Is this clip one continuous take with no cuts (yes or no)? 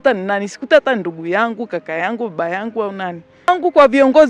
yes